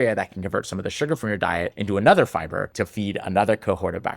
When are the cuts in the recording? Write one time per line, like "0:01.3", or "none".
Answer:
0:01.8
0:02.7